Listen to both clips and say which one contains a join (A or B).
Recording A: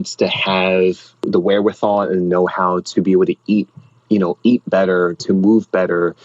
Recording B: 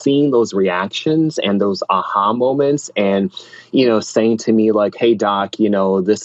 A